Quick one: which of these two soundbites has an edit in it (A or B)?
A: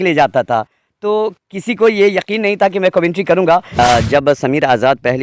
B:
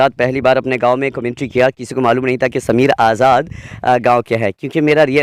A